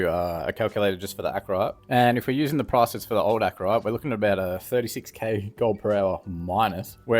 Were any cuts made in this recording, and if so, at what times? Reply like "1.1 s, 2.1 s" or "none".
1.8 s

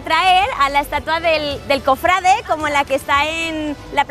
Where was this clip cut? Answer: none

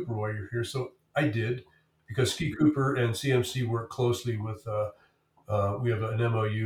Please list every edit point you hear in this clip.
none

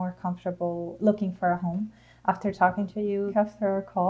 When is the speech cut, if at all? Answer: 0.9 s, 3.3 s

